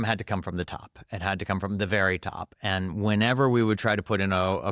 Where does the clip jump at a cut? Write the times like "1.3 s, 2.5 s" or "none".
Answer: none